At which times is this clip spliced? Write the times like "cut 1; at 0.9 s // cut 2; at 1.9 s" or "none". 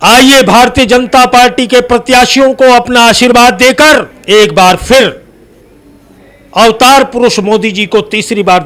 cut 1; at 4.1 s

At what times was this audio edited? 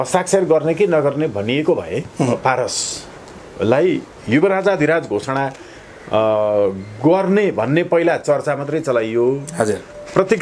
cut 1; at 2.3 s

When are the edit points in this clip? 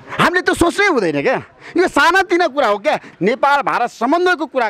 cut 1; at 3.1 s

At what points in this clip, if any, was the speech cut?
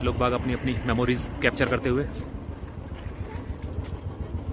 none

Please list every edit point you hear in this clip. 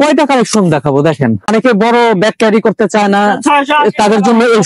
cut 1; at 1.5 s

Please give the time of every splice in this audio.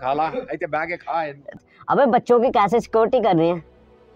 cut 1; at 1.6 s

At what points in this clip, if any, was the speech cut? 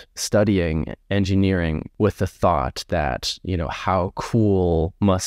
cut 1; at 1.0 s // cut 2; at 1.9 s

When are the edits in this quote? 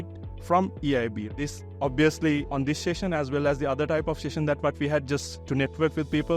cut 1; at 1.3 s

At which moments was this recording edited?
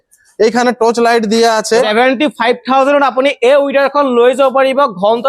cut 1; at 1.9 s

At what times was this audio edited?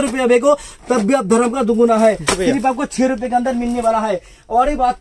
none

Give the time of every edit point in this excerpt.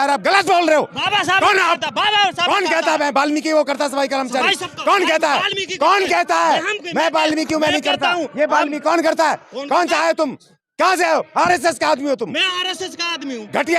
none

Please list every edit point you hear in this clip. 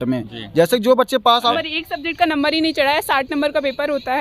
cut 1; at 1.4 s

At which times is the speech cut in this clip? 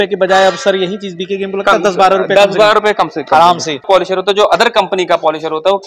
cut 1; at 3.9 s

